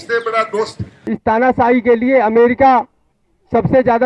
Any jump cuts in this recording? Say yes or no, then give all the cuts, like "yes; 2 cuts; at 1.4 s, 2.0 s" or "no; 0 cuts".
yes; 1 cut; at 0.9 s